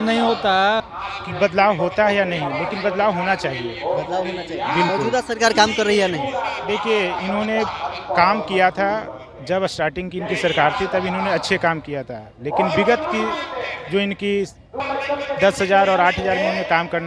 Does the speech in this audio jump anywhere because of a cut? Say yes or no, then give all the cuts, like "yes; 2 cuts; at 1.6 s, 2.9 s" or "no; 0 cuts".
yes; 2 cuts; at 0.8 s, 14.8 s